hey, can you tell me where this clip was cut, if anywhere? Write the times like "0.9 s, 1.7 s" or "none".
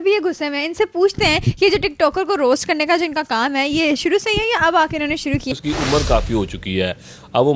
5.5 s